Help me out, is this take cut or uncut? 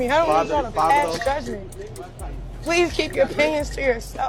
uncut